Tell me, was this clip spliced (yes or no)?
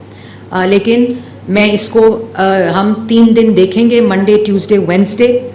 no